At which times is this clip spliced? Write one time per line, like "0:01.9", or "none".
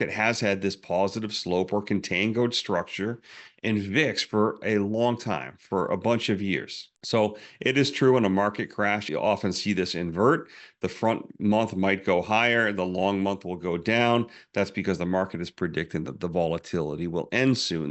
0:09.0